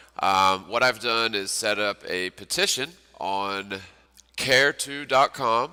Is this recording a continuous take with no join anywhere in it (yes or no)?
yes